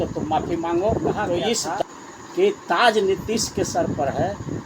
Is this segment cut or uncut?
cut